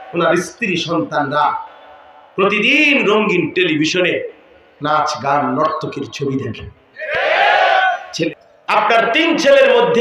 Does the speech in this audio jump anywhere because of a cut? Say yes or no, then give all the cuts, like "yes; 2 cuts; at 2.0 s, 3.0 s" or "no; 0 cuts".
yes; 1 cut; at 8.2 s